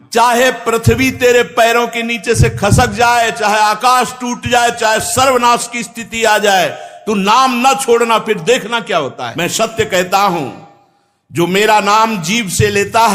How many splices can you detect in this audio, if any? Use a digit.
1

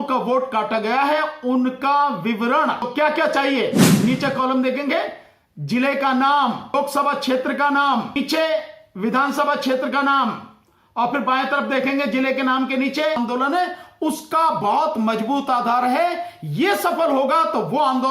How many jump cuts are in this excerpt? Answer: 4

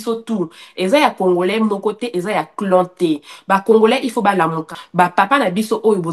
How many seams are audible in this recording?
1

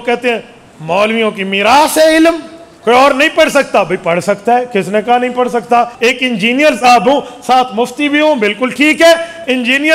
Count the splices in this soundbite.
2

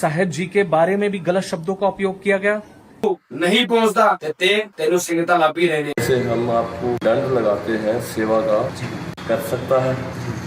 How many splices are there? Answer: 1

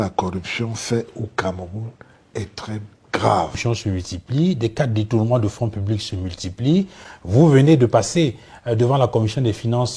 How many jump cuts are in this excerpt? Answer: 1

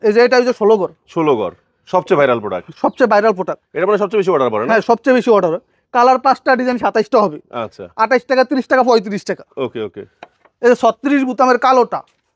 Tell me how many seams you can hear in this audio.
0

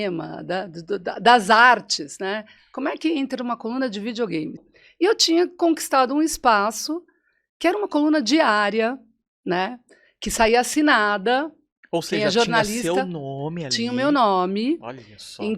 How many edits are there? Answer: 1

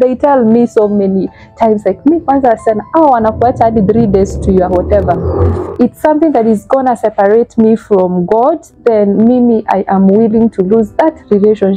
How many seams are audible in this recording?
1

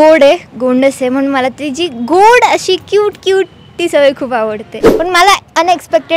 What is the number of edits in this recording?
1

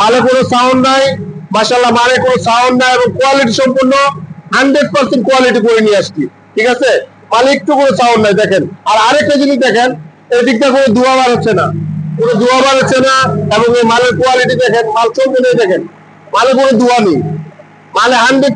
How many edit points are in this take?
0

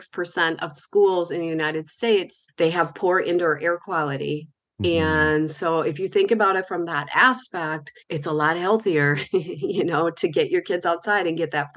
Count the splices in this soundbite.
0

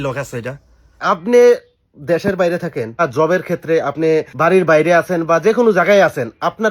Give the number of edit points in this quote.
3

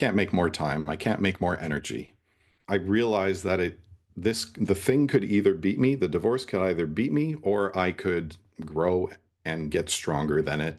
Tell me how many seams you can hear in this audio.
1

